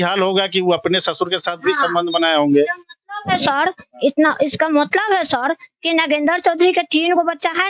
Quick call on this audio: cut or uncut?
uncut